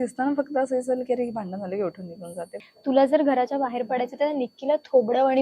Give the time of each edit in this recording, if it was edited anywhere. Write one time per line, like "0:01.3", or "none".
0:02.6